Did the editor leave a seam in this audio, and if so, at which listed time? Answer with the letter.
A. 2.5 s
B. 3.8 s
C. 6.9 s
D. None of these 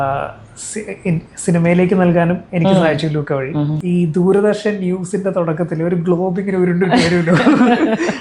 B